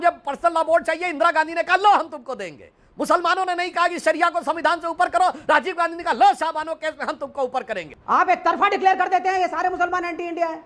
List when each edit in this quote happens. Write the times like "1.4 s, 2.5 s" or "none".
7.9 s